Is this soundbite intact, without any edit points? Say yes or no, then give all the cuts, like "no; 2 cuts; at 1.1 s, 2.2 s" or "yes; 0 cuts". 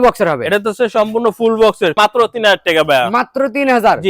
no; 1 cut; at 1.9 s